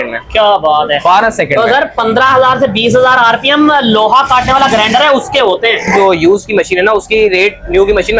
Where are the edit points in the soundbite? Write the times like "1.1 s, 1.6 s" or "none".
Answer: 5.9 s